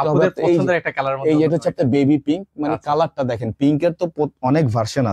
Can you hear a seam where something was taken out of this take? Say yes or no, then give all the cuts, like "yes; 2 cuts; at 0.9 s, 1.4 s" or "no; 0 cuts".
no; 0 cuts